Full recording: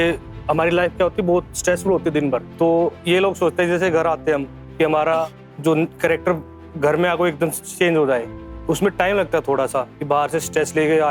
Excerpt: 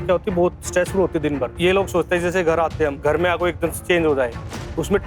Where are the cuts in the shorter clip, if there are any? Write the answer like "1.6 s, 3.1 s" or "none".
1.5 s, 3.0 s, 3.8 s